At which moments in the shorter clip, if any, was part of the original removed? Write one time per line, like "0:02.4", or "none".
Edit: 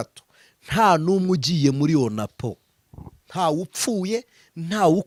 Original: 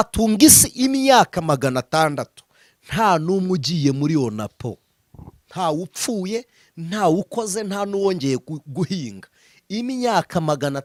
none